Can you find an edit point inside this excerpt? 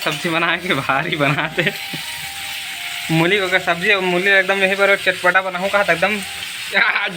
no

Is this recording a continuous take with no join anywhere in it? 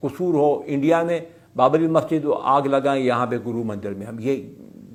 yes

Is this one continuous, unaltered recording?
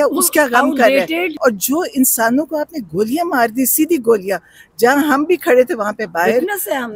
no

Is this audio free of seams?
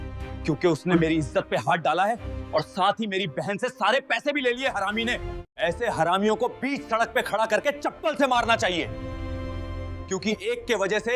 yes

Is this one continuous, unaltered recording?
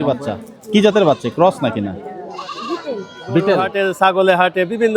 no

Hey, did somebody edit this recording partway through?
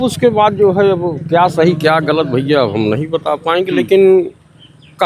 no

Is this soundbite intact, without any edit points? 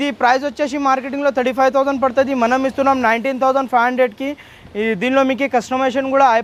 yes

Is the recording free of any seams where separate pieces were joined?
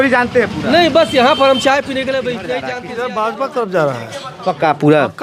no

